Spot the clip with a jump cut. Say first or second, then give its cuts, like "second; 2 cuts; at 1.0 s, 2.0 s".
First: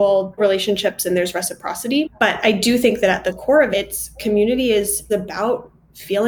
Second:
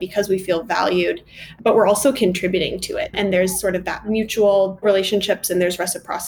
second; 2 cuts; at 1.4 s, 3.1 s